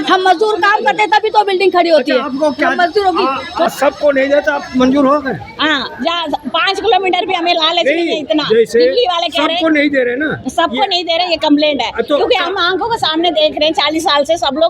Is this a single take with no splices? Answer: no; 1 cut; at 3.7 s

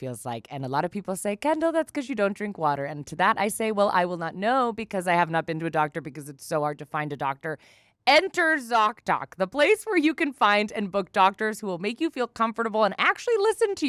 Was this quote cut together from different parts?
no; 0 cuts

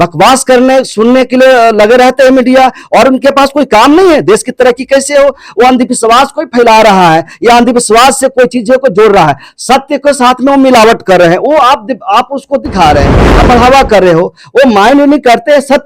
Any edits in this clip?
no; 0 cuts

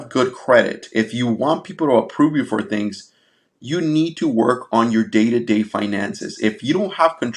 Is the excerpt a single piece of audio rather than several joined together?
yes; 0 cuts

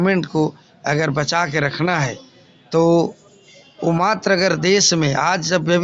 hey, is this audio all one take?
yes; 0 cuts

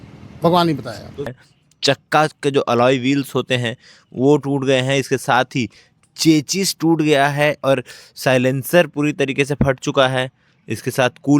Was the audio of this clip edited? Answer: yes; 1 cut; at 1.3 s

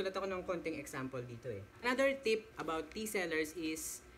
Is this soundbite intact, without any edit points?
no; 1 cut; at 1.7 s

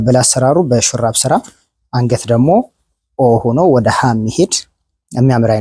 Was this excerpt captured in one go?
yes; 0 cuts

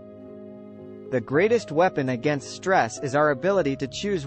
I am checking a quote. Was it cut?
yes; 1 cut; at 1.1 s

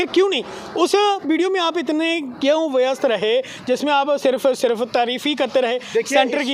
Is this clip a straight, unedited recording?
yes; 0 cuts

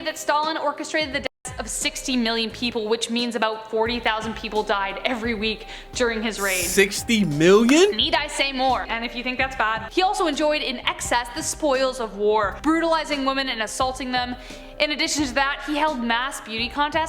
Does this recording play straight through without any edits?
no; 1 cut; at 9.8 s

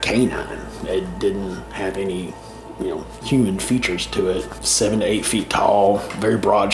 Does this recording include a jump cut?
yes; 1 cut; at 4.6 s

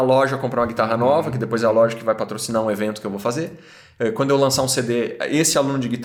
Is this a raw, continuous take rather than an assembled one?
yes; 0 cuts

